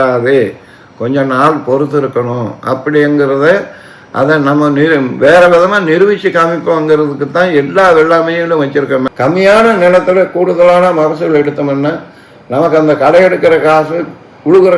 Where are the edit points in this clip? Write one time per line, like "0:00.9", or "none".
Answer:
0:09.1